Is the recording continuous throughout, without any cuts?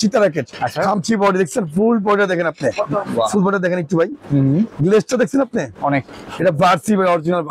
yes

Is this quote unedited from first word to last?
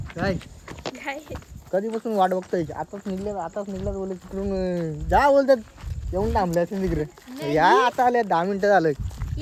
yes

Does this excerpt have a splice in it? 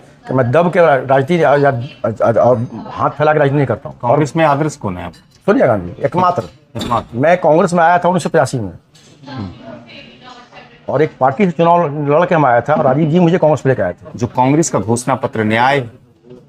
yes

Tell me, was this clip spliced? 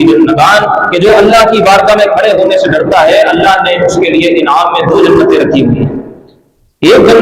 no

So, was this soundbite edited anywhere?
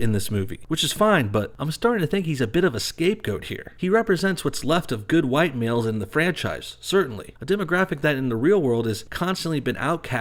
no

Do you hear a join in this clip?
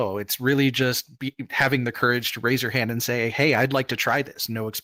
no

